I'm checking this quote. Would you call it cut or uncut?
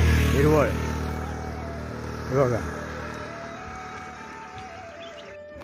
uncut